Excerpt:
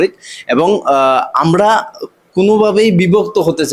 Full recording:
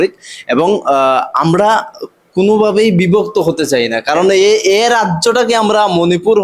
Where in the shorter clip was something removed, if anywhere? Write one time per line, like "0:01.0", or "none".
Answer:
none